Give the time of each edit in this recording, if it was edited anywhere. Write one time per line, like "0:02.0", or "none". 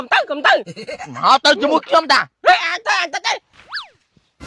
0:03.5